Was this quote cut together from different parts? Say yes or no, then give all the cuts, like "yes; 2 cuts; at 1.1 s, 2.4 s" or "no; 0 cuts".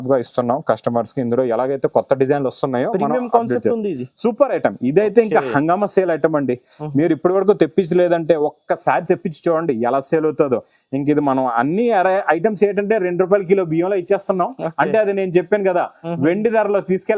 no; 0 cuts